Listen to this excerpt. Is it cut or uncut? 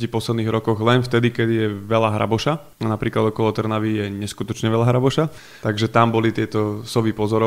cut